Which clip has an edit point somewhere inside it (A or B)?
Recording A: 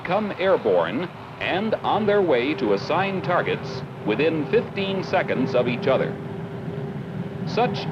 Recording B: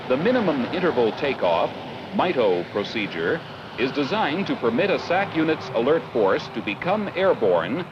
B